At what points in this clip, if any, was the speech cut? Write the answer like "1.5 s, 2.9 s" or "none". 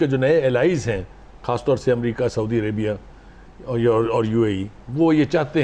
none